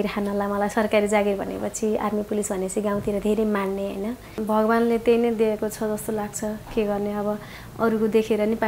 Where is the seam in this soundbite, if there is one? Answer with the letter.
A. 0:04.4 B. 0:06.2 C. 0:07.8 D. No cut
A